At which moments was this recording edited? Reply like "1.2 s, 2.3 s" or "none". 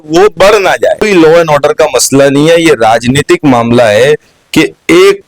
1.1 s